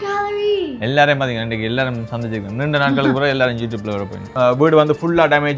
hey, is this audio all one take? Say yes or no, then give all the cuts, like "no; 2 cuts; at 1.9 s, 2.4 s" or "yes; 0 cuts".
no; 1 cut; at 4.3 s